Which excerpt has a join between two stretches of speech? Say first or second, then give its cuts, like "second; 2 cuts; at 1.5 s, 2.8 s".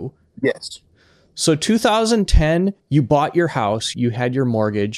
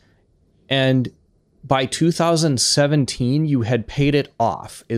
first; 2 cuts; at 2.8 s, 3.9 s